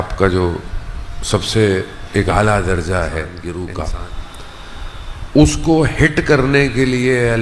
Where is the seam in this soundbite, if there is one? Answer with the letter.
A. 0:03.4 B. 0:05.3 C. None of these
A